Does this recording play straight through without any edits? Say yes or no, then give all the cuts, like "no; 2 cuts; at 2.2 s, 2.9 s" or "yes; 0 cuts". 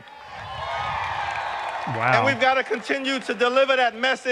yes; 0 cuts